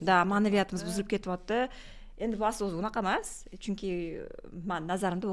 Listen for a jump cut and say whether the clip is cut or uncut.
uncut